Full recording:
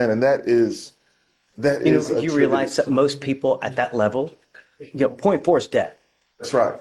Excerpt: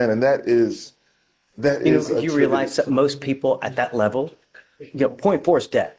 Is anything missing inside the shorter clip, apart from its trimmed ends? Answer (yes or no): no